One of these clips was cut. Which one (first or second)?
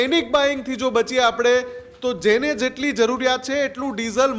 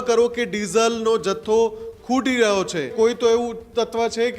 second